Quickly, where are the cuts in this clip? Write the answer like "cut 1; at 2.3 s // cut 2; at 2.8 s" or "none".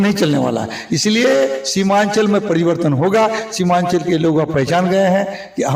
none